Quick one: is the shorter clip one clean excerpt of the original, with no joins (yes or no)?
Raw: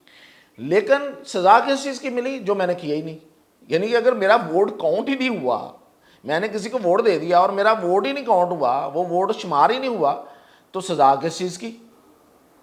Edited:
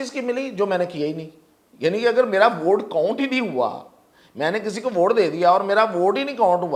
yes